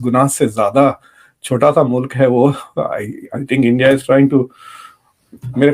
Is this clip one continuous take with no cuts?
yes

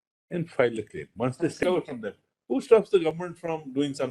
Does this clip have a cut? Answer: yes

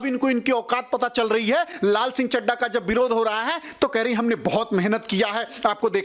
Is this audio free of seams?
yes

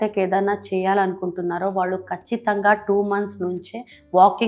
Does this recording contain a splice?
no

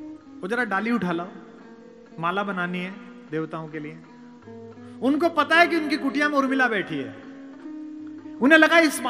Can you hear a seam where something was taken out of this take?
no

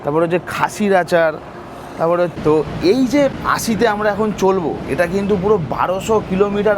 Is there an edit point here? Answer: yes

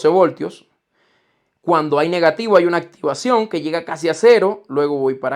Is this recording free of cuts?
yes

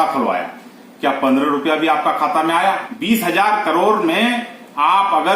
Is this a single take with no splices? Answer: no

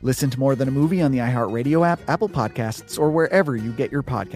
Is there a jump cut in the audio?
no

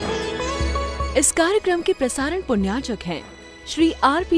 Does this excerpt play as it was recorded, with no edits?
no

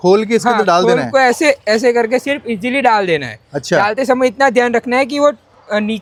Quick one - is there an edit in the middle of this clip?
no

